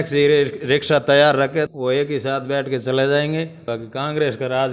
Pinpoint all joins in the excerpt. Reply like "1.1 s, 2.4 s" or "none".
1.7 s, 3.7 s